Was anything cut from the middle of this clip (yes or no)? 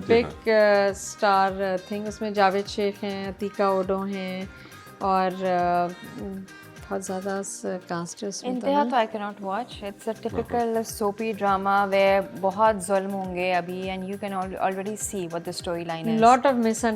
no